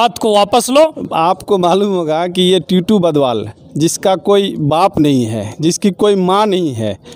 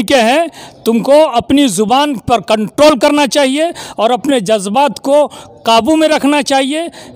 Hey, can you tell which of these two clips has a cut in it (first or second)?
first